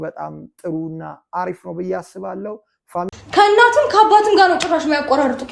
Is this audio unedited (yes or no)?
no